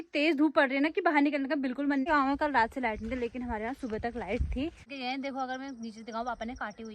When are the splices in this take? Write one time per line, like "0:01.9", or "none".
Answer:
0:02.1
0:04.9